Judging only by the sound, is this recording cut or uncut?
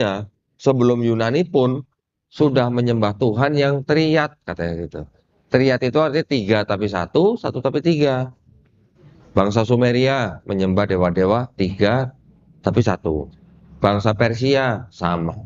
uncut